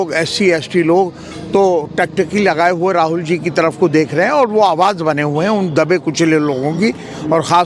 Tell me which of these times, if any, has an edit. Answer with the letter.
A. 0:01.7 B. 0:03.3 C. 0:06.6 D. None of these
D